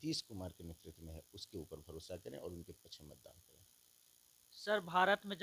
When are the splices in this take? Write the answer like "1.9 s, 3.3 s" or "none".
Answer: none